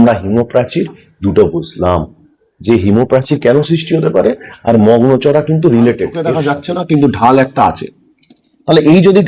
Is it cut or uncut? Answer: cut